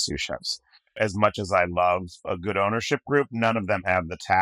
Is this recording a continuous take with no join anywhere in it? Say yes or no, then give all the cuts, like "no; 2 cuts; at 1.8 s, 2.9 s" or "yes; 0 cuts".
no; 1 cut; at 1.0 s